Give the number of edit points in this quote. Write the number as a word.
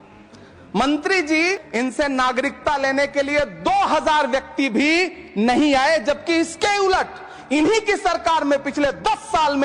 one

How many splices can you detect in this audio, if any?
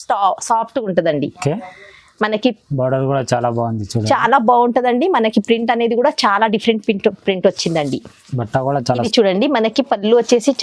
one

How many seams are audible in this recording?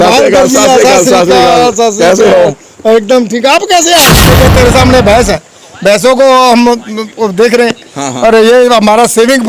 one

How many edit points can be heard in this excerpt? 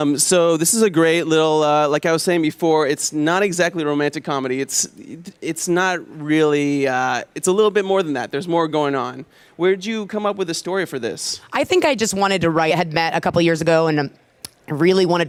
zero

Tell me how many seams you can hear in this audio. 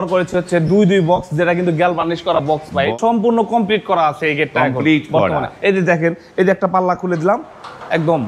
one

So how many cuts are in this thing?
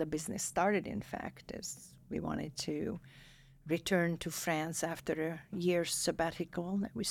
zero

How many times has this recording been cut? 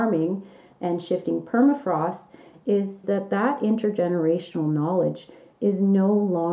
one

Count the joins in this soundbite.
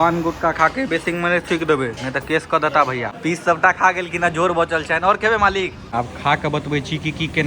two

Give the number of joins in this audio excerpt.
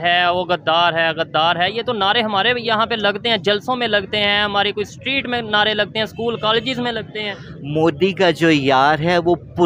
zero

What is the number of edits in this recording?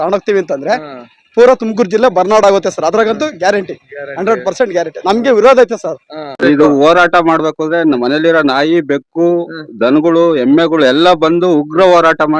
one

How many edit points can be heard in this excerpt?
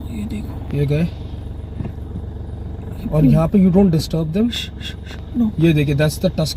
zero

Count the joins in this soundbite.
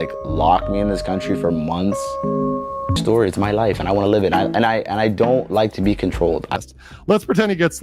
one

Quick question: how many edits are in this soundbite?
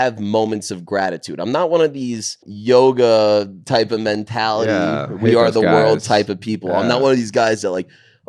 one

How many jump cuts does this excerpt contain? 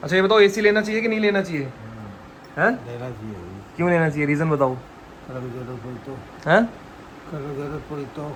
zero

